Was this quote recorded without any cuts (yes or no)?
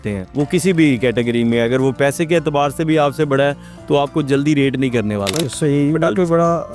no